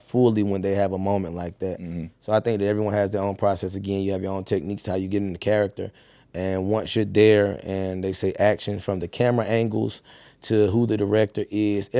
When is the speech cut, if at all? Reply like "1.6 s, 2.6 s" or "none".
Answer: none